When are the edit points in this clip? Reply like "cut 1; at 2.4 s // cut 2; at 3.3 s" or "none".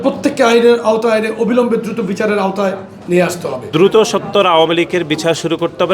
cut 1; at 3.7 s